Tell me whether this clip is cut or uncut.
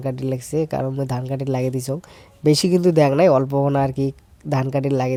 uncut